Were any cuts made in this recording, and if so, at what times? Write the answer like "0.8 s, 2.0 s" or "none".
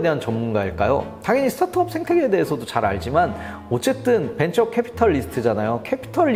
none